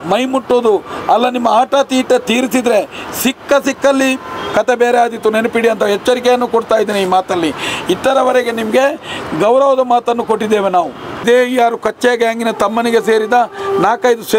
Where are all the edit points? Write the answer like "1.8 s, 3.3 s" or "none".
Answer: 11.2 s